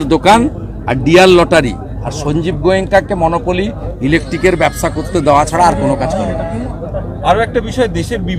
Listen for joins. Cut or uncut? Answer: uncut